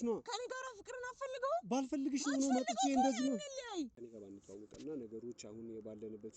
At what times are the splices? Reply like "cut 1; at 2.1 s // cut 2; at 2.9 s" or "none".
cut 1; at 4.0 s